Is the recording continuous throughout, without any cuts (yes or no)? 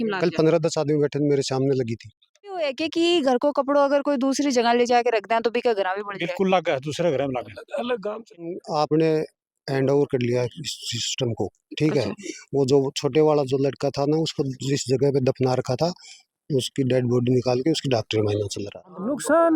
no